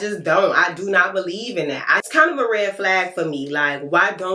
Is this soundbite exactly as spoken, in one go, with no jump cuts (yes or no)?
no